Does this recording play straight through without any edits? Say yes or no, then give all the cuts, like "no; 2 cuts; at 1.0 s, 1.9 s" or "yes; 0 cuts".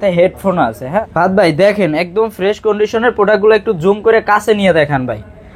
no; 1 cut; at 1.0 s